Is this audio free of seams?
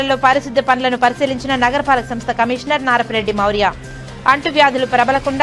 yes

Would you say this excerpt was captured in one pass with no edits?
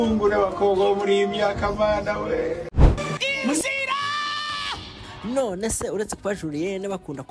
no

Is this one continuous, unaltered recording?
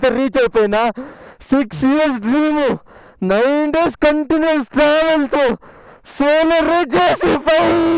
yes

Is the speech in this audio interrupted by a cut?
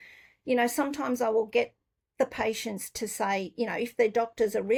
no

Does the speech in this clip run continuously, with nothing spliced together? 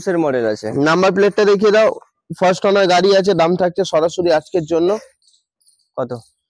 yes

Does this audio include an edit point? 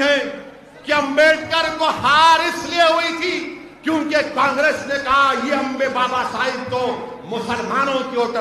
no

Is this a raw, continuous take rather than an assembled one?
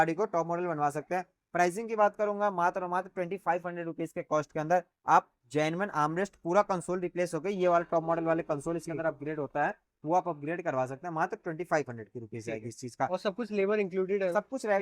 yes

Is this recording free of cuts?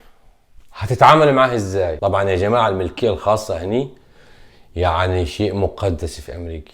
no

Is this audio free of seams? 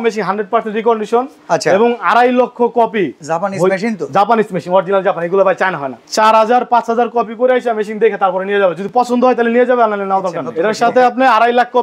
no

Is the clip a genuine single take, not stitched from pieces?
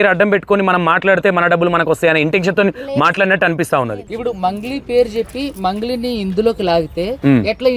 no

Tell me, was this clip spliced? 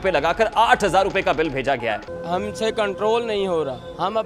yes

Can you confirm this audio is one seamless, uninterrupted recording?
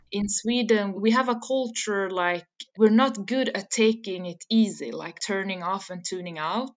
no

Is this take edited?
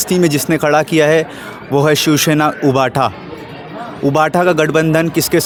no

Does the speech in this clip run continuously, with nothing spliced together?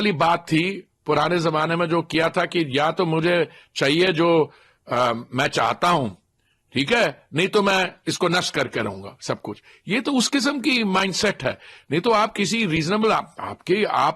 yes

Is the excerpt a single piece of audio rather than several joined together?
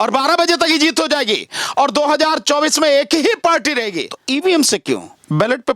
no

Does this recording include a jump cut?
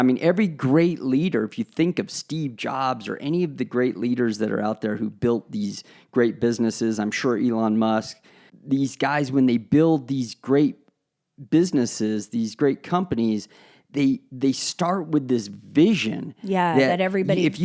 yes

